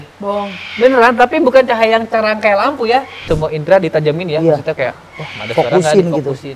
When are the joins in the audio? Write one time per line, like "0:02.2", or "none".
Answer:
0:03.1